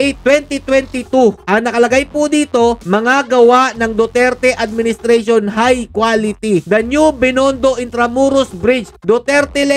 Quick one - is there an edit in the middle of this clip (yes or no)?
no